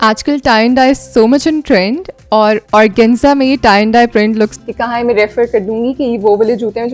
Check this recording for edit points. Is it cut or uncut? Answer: cut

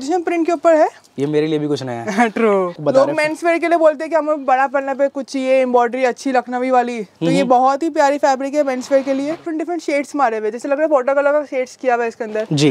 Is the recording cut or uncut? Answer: cut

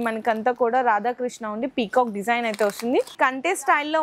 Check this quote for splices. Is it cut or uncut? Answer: cut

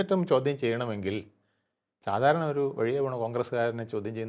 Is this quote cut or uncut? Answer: uncut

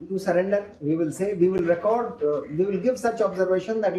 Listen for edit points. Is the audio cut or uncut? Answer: uncut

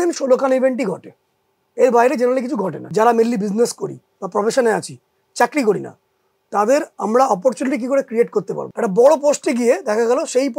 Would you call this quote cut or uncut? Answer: cut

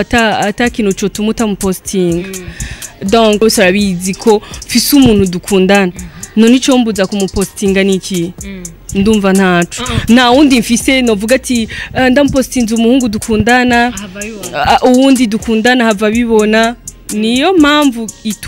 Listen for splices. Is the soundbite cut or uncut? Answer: cut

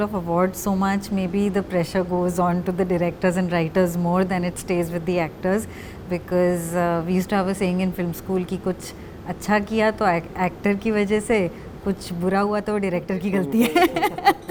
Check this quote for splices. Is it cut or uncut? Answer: uncut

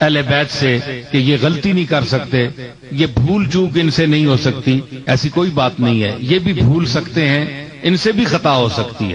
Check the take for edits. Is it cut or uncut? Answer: uncut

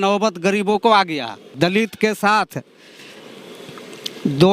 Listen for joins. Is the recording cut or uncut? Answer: cut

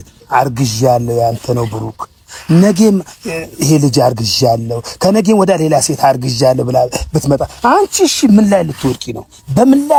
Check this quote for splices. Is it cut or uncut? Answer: uncut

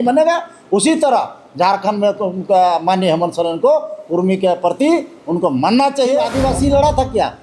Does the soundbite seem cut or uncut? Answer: cut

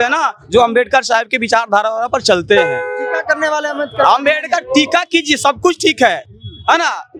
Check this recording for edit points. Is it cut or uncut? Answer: uncut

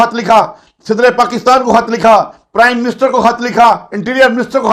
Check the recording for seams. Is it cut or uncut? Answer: uncut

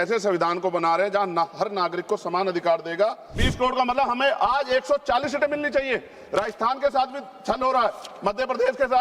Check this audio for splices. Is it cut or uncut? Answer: cut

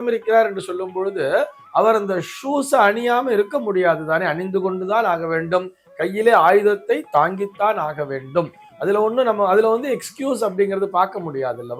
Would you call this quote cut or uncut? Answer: uncut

